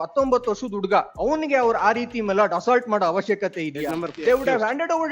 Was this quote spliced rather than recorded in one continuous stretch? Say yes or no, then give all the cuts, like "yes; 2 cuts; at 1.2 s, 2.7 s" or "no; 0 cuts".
yes; 2 cuts; at 1.1 s, 4.1 s